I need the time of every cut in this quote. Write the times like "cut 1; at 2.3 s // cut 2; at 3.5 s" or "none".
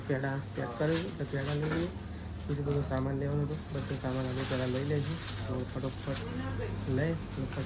none